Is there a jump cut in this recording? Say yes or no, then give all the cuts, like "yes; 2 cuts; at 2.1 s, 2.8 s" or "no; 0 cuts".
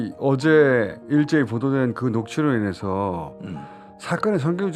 no; 0 cuts